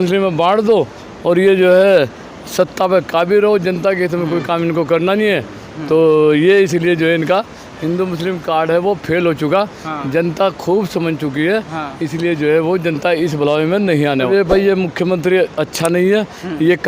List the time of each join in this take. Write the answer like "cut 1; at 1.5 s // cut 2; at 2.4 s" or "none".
cut 1; at 14.3 s